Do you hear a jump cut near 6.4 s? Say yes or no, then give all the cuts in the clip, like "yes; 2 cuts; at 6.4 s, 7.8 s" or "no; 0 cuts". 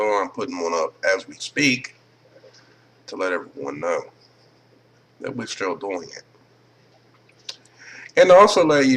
no; 1 cut; at 2.8 s